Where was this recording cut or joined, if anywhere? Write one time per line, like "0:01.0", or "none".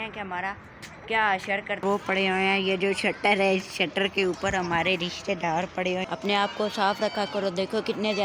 0:01.8
0:06.0